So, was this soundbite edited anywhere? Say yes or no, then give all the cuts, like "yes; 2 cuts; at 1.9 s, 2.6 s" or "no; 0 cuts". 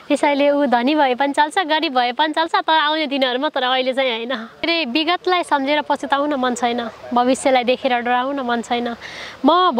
yes; 1 cut; at 4.6 s